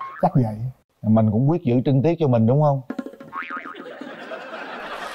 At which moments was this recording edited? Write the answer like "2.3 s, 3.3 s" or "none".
none